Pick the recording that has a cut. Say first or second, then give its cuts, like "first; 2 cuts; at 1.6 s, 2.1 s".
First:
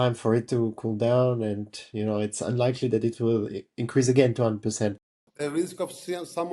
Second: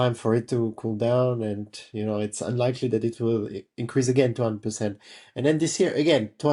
first; 1 cut; at 5.3 s